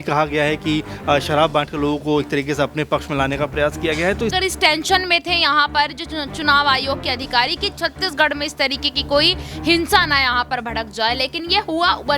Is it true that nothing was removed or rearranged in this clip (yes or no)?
no